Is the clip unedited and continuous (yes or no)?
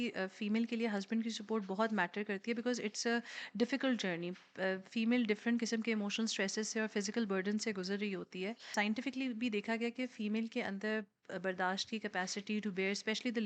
no